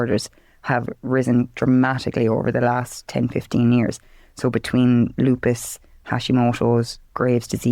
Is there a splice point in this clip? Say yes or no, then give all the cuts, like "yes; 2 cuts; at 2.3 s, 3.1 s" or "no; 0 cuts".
no; 0 cuts